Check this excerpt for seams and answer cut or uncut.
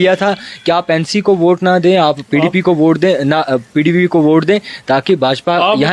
uncut